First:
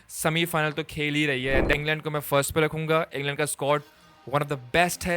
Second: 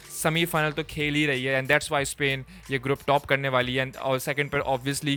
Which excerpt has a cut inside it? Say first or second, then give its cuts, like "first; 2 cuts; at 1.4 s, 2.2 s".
first; 1 cut; at 1.7 s